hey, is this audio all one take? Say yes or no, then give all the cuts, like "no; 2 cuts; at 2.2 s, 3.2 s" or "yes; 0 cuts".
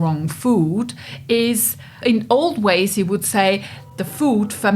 no; 2 cuts; at 2.0 s, 3.8 s